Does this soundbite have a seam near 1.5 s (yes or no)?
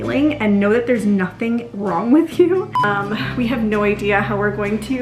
no